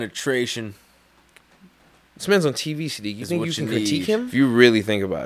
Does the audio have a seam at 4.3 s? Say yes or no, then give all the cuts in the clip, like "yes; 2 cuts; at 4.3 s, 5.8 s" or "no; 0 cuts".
yes; 1 cut; at 4.3 s